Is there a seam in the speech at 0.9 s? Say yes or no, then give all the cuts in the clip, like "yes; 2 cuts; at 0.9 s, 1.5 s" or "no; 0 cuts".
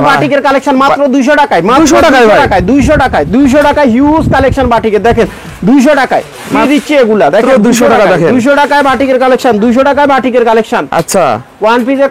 no; 0 cuts